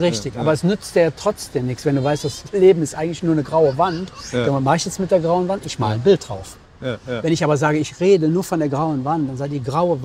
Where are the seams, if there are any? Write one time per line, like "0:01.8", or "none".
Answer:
none

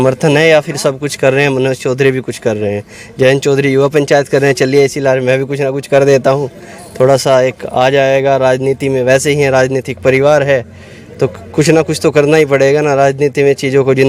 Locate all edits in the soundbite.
none

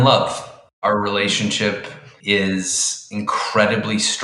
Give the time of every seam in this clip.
0:00.8
0:02.1

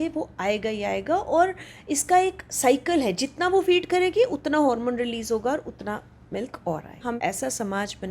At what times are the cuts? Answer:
0:07.2

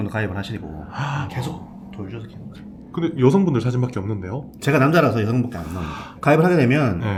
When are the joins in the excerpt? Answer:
none

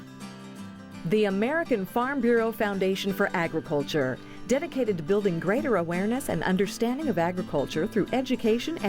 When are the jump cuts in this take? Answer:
0:01.0

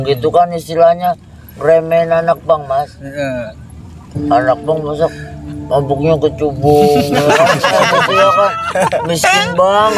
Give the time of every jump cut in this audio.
none

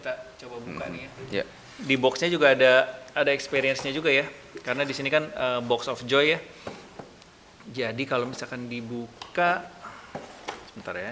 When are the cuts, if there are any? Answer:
none

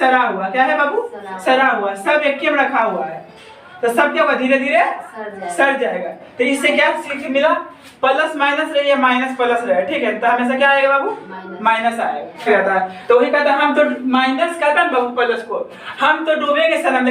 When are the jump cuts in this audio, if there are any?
0:12.4

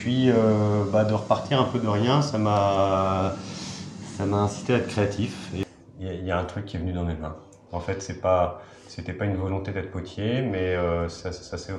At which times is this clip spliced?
0:05.6

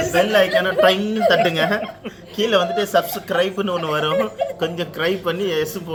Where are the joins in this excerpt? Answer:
none

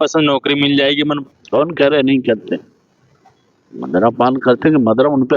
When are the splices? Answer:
0:01.3

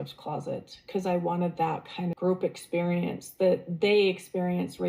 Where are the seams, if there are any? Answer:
0:02.1

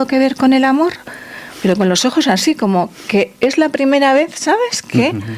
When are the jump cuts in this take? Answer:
none

